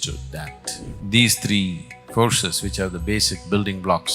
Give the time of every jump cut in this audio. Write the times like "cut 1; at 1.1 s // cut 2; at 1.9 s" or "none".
cut 1; at 0.9 s